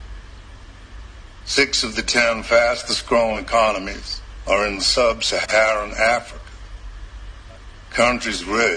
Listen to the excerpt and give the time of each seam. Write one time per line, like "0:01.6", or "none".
0:05.5
0:07.2